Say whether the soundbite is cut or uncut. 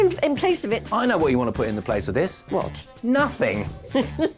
uncut